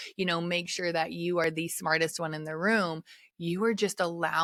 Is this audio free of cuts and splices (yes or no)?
yes